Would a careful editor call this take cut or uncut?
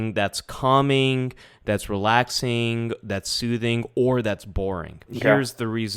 cut